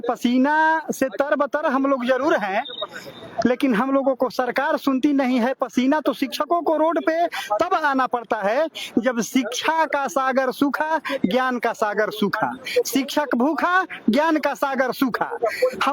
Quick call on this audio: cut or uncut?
uncut